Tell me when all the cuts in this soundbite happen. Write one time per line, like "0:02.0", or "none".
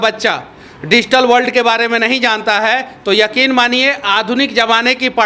none